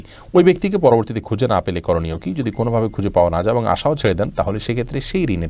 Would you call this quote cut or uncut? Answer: uncut